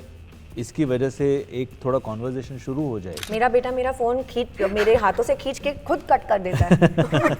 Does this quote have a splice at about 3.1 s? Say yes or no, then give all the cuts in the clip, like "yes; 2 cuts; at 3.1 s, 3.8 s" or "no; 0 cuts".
yes; 1 cut; at 3.1 s